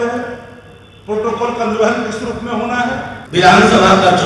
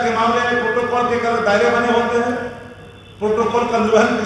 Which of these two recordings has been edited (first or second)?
first